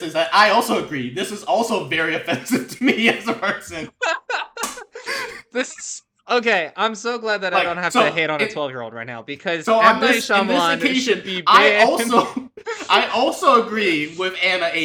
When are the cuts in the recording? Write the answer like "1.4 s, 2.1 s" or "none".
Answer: none